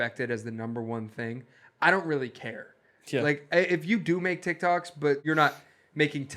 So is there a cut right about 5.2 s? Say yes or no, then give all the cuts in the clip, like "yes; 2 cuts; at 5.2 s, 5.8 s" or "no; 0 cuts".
yes; 1 cut; at 5.2 s